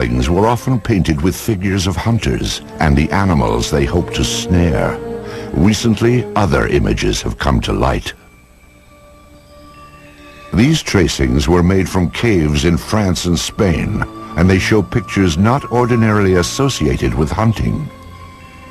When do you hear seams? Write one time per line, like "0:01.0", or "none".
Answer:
0:05.0